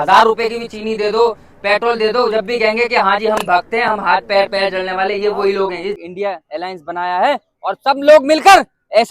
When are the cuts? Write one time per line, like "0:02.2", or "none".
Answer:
0:06.0